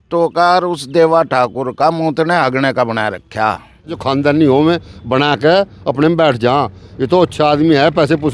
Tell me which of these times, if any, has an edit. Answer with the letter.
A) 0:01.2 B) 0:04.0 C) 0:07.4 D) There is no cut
B